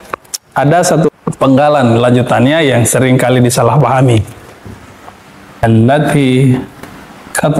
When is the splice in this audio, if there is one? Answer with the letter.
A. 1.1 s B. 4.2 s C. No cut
A